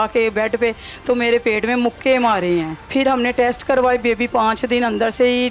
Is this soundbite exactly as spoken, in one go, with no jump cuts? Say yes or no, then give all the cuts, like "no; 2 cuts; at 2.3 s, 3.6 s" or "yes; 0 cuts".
no; 1 cut; at 2.8 s